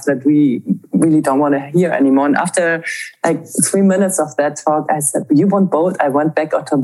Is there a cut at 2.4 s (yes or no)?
no